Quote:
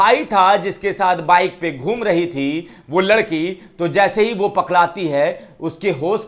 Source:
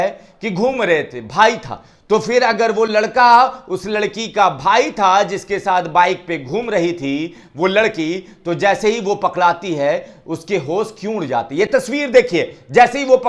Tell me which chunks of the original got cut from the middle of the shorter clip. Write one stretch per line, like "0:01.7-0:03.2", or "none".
none